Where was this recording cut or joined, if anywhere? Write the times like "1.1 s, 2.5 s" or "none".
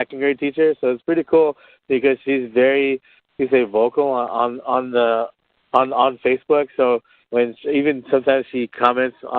7.2 s